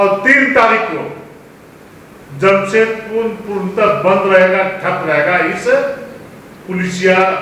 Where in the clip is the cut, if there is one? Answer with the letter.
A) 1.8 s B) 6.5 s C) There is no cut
C